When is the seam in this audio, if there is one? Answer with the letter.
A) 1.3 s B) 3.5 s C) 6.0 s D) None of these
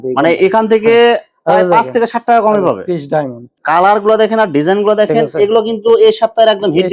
B